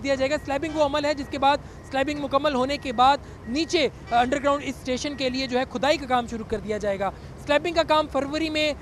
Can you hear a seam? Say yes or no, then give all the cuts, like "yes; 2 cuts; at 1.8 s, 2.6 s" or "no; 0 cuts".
no; 0 cuts